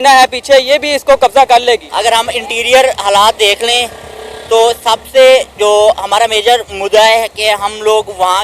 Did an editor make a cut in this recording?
yes; 1 cut; at 1.9 s

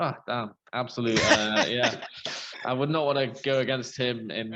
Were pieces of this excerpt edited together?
no; 0 cuts

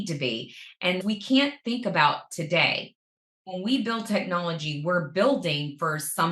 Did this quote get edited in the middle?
yes; 2 cuts; at 1.0 s, 3.4 s

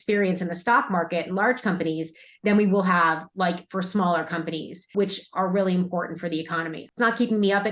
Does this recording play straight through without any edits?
no; 2 cuts; at 4.9 s, 6.8 s

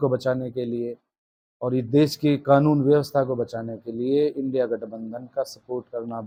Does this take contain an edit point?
no; 0 cuts

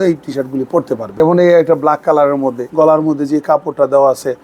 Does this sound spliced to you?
yes; 2 cuts; at 1.1 s, 2.7 s

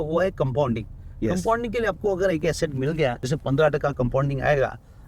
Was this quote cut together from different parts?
yes; 1 cut; at 3.3 s

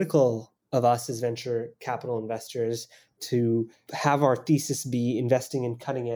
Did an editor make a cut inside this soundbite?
yes; 1 cut; at 3.8 s

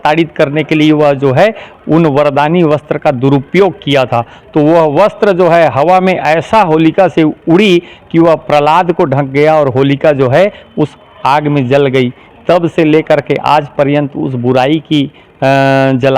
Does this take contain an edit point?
no; 0 cuts

